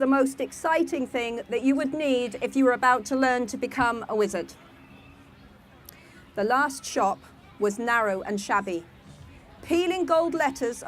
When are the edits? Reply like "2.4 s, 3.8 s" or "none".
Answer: 2.7 s